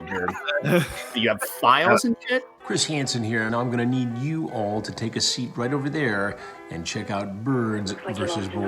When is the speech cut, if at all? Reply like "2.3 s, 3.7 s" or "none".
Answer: 2.5 s